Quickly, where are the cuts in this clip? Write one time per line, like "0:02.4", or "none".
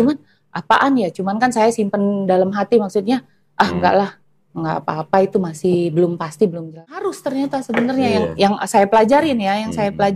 0:07.0